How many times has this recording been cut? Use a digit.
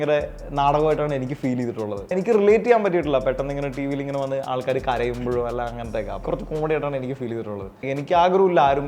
3